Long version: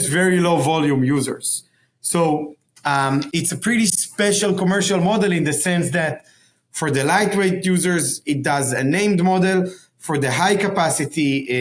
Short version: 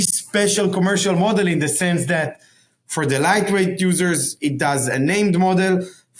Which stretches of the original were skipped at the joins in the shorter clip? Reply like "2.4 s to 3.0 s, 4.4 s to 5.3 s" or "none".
none